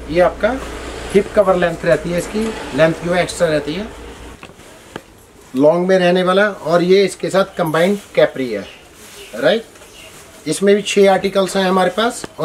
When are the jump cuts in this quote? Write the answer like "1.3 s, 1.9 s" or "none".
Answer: 4.2 s